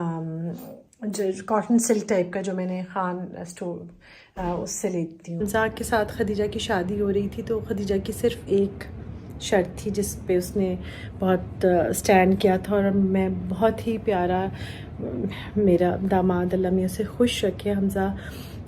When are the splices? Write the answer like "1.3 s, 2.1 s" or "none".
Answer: 5.4 s